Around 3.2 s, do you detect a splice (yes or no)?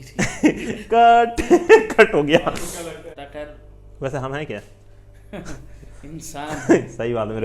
yes